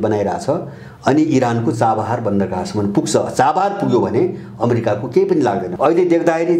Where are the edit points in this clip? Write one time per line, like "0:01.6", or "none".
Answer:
0:05.7